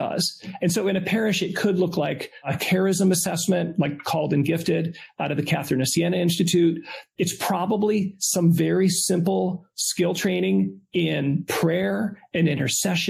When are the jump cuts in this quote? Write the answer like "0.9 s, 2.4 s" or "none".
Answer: 2.5 s